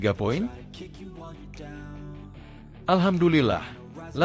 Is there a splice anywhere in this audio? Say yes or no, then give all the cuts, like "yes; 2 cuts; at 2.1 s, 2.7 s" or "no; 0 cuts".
yes; 2 cuts; at 0.9 s, 2.8 s